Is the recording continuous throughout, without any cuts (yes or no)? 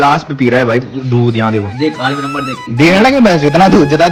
yes